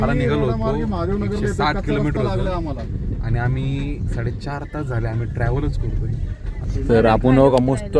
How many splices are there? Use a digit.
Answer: 1